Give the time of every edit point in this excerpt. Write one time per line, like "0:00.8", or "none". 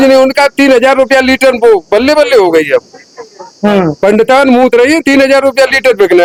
none